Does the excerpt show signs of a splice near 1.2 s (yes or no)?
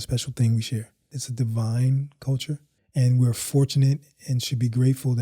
yes